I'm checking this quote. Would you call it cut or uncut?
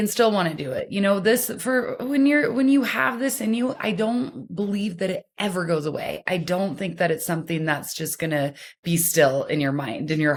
uncut